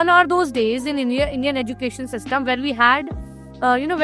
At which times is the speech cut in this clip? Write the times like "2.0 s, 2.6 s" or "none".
none